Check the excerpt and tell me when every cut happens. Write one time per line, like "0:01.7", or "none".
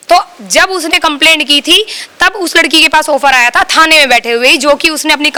none